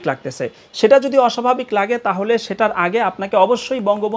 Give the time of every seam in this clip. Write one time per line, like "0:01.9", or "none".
none